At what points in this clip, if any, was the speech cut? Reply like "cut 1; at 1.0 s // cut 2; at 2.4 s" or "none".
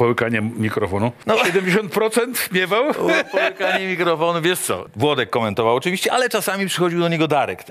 cut 1; at 1.2 s // cut 2; at 4.8 s